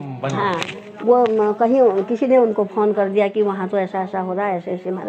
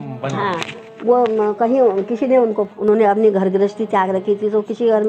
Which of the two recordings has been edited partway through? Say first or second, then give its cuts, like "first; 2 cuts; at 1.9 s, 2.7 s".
second; 1 cut; at 2.7 s